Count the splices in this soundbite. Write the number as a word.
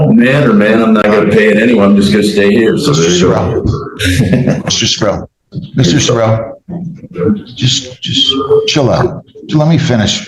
zero